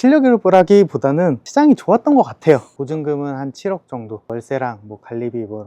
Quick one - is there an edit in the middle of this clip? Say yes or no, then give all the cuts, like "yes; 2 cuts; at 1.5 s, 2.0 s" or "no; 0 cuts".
yes; 1 cut; at 2.7 s